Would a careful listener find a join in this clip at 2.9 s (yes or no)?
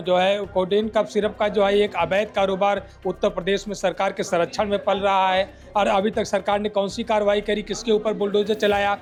no